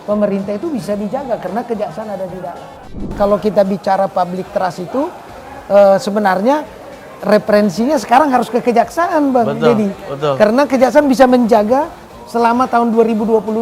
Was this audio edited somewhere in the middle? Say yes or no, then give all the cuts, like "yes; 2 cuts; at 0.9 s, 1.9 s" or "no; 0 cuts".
yes; 1 cut; at 3.1 s